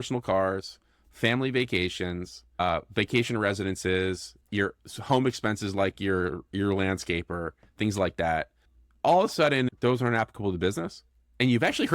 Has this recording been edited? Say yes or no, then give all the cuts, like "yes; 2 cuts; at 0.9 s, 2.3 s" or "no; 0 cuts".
yes; 2 cuts; at 2.6 s, 9.7 s